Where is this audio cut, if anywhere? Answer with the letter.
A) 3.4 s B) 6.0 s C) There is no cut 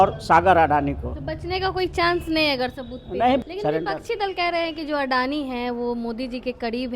A